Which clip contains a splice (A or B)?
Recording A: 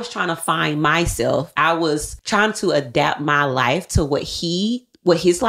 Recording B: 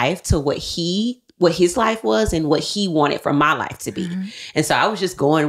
A